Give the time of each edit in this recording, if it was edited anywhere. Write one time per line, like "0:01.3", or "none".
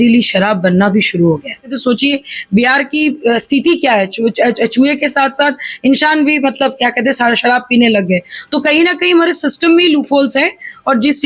0:01.8